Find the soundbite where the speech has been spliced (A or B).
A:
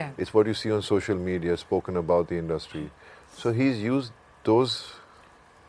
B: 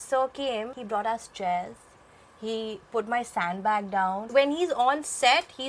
B